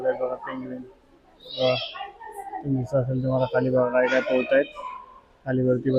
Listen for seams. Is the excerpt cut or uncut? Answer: uncut